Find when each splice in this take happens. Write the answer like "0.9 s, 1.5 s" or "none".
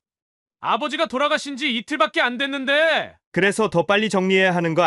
none